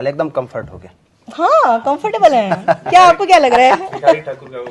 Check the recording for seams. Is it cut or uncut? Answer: uncut